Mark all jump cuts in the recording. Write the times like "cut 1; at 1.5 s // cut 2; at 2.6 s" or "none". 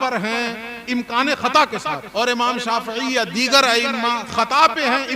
cut 1; at 2.0 s